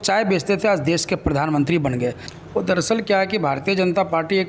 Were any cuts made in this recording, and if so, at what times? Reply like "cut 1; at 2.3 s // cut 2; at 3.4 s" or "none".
cut 1; at 2.3 s